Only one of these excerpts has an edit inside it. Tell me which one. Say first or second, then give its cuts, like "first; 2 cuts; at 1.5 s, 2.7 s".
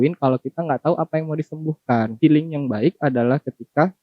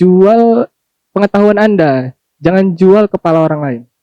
first; 1 cut; at 2.1 s